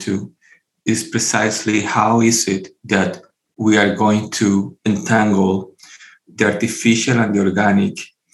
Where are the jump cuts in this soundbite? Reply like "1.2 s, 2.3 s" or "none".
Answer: 2.7 s, 4.7 s